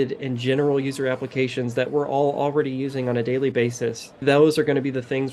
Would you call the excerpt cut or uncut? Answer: cut